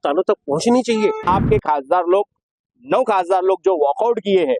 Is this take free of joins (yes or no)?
no